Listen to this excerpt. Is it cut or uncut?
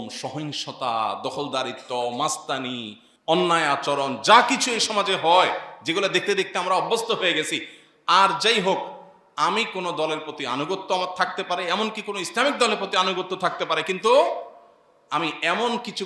uncut